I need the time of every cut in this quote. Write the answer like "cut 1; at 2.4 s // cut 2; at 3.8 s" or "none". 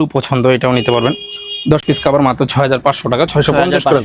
none